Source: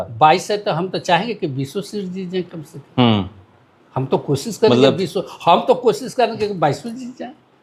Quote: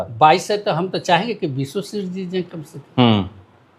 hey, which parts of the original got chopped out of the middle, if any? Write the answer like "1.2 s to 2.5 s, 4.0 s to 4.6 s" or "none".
none